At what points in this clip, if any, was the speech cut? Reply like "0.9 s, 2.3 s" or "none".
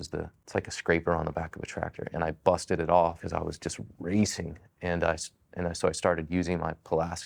none